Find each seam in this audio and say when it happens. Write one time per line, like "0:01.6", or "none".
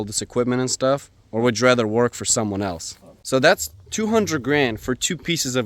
0:03.5

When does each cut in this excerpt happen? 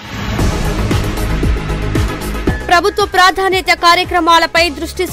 0:01.3

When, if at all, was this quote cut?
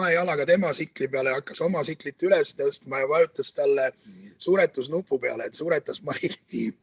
none

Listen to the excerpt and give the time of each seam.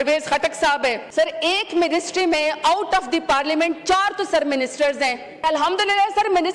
0:01.0
0:05.4

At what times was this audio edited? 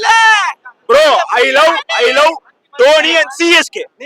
none

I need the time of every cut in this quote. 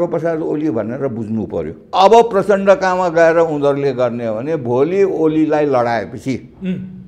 0:01.8

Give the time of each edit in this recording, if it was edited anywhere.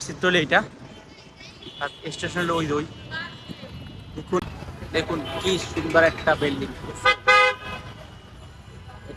0:04.4

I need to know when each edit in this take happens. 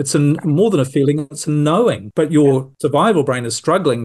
0:02.0
0:02.7

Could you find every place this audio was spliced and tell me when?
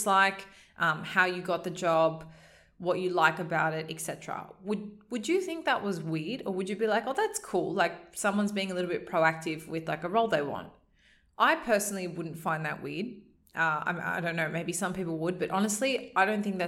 none

